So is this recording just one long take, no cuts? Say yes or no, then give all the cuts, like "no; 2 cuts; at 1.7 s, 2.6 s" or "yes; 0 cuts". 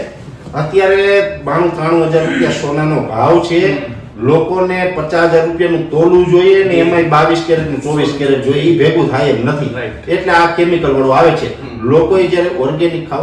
yes; 0 cuts